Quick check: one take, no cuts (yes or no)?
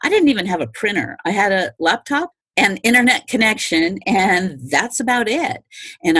no